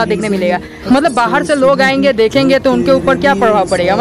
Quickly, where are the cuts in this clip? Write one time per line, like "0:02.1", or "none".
0:01.0